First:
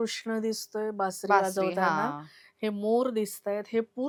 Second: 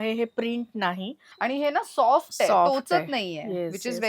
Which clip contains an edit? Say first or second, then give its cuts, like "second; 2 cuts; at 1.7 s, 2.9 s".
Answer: second; 1 cut; at 1.2 s